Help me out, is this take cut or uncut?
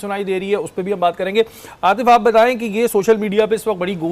uncut